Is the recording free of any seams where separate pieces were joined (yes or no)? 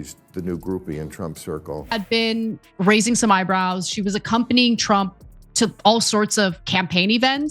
no